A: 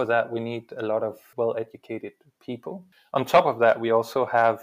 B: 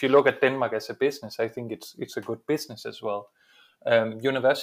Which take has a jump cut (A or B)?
A